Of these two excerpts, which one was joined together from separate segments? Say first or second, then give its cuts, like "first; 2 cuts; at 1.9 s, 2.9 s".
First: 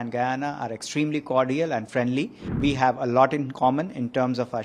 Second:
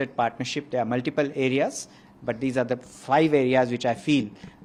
first; 1 cut; at 2.5 s